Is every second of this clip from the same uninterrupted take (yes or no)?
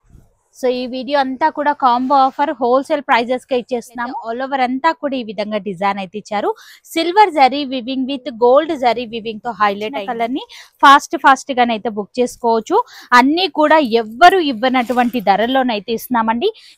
no